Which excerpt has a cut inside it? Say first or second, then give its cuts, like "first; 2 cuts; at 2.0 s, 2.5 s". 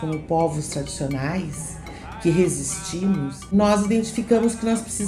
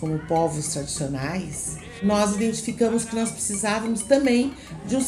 second; 1 cut; at 1.9 s